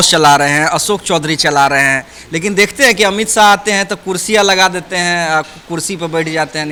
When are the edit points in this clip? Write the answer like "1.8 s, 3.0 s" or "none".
none